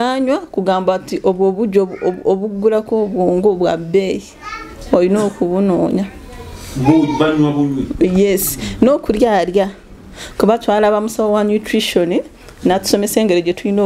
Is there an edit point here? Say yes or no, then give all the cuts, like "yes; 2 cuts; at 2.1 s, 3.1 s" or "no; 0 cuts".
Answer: no; 0 cuts